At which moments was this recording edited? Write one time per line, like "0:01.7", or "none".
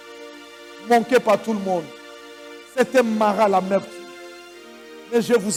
none